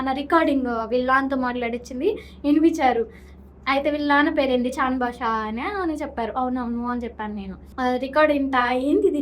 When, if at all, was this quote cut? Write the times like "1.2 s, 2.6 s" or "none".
7.6 s